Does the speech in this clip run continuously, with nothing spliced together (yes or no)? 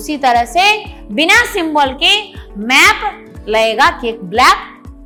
yes